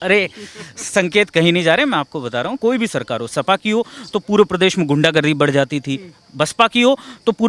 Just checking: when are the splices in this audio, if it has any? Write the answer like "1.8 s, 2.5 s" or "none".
2.6 s